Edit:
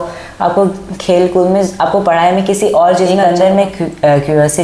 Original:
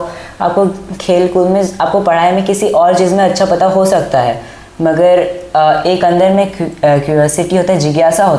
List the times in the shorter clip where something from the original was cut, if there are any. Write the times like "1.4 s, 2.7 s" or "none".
3.2 s